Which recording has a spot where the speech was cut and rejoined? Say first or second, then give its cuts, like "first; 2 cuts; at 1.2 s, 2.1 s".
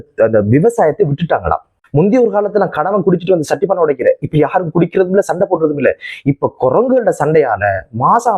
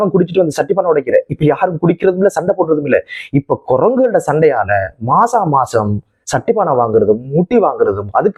first; 1 cut; at 1.7 s